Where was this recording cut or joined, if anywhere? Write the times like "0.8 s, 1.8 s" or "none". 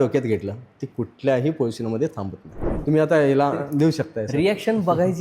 2.7 s